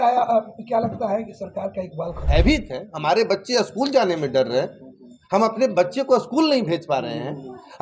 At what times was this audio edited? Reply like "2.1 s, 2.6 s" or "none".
2.2 s